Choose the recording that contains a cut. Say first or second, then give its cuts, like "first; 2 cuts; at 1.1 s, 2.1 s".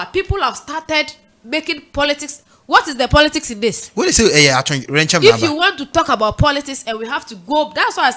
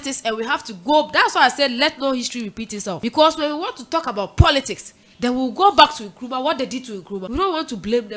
second; 2 cuts; at 3.0 s, 7.3 s